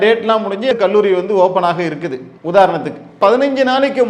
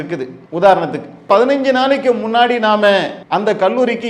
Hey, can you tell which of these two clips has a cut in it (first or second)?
second